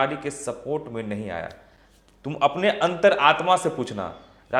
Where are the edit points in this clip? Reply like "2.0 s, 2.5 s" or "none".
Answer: none